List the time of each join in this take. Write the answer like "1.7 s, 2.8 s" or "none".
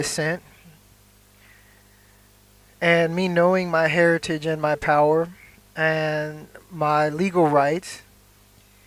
3.0 s

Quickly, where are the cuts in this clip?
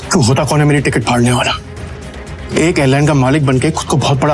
none

